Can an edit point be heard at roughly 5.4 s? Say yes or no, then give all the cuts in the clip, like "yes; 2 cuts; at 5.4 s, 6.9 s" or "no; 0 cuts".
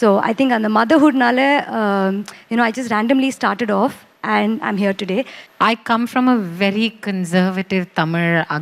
yes; 1 cut; at 5.4 s